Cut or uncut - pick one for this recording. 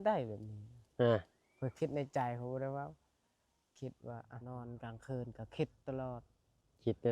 cut